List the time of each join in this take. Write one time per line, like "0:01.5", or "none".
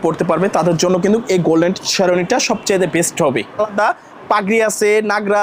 0:03.6